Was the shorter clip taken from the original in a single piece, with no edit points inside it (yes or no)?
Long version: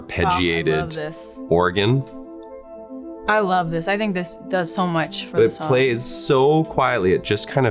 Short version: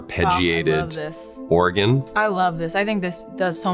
no